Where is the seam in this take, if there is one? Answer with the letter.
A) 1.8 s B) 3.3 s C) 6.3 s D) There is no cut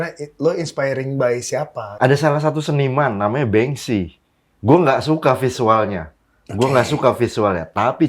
A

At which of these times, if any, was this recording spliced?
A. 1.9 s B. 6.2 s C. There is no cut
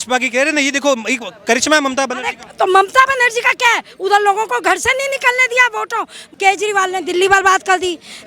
B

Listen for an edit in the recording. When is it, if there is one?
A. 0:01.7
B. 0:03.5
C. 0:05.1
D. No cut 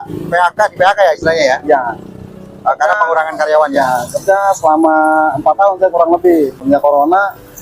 D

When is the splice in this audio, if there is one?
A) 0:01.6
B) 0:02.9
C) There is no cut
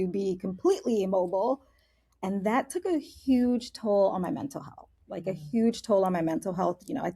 C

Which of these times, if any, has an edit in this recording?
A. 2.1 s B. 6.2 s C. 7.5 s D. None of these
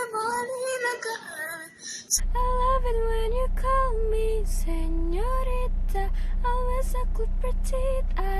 A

